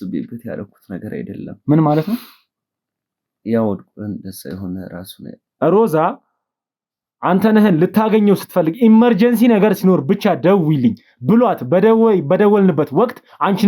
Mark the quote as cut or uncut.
cut